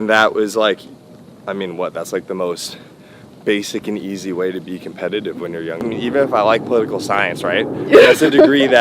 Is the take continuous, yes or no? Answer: no